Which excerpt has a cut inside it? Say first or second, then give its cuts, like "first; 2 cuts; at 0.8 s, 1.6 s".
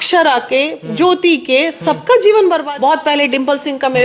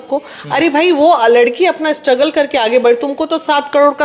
first; 1 cut; at 2.6 s